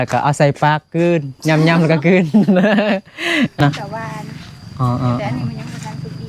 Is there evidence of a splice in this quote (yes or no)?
yes